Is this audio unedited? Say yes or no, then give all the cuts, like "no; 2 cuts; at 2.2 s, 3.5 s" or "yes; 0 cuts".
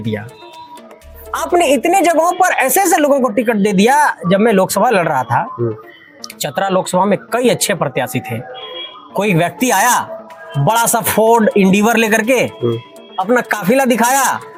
yes; 0 cuts